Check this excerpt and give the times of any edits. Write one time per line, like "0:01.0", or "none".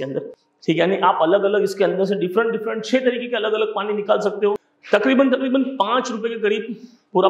0:04.7